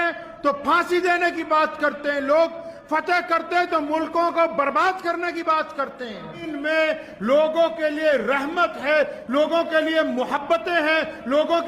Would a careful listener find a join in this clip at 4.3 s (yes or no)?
no